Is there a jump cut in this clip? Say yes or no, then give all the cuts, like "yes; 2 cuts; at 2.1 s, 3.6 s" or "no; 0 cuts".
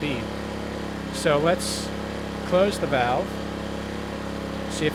no; 0 cuts